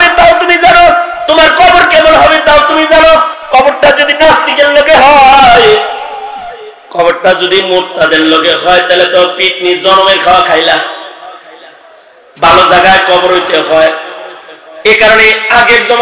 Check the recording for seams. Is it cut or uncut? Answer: cut